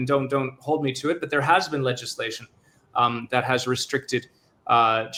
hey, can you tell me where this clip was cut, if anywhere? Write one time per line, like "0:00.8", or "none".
none